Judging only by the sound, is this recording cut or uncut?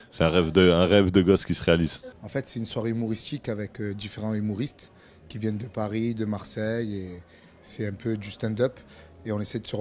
cut